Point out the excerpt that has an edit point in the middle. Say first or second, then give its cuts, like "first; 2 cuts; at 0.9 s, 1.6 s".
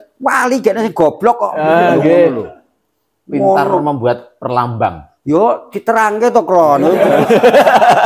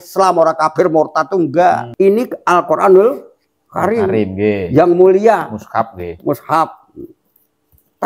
second; 1 cut; at 1.9 s